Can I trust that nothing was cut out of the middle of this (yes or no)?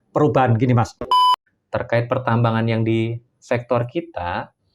no